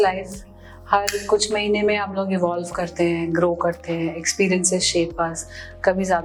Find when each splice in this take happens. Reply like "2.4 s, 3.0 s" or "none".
none